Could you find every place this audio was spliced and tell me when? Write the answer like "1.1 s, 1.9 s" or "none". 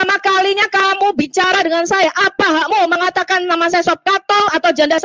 none